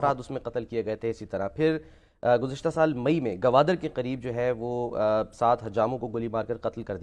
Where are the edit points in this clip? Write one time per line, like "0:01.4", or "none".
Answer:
none